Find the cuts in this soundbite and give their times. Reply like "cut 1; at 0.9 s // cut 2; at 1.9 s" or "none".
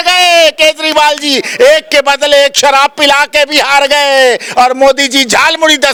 none

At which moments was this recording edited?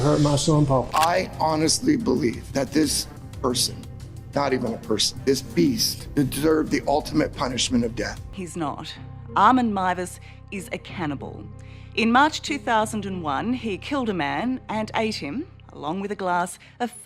cut 1; at 0.9 s // cut 2; at 8.2 s

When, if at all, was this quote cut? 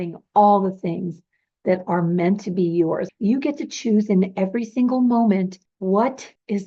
cut 1; at 3.1 s

